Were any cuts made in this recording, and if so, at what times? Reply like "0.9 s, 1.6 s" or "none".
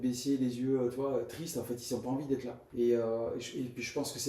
2.6 s

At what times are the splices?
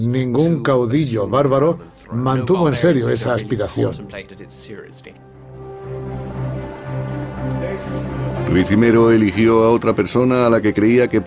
none

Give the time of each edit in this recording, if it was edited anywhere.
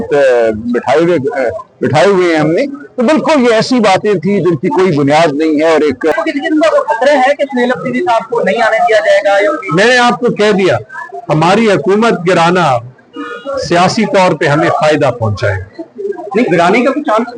6.1 s

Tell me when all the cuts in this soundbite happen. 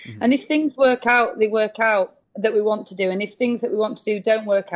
2.2 s

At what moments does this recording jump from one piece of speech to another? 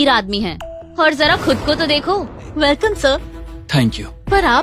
2.4 s

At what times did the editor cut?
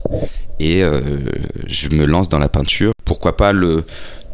3.0 s

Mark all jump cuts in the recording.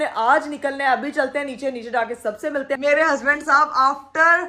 2.7 s

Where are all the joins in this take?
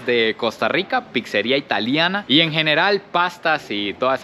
none

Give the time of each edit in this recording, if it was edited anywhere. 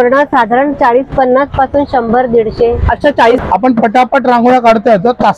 3.4 s

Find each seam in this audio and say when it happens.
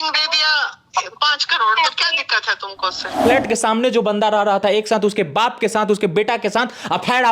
3.2 s

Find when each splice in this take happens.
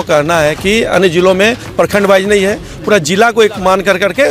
none

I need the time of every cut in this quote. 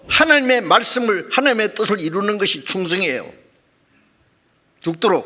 none

